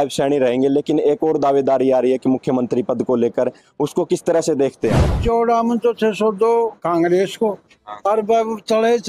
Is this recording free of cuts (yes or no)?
no